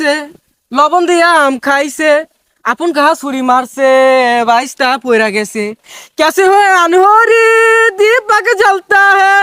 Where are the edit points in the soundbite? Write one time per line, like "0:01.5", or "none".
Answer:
none